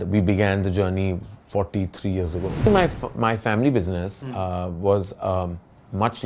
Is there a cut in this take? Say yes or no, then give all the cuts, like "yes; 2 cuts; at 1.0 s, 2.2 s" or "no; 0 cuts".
yes; 1 cut; at 2.7 s